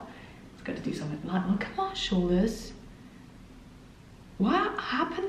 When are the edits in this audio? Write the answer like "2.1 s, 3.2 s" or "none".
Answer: none